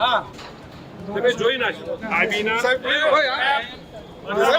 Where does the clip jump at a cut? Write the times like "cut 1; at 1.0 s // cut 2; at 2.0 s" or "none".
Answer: cut 1; at 2.0 s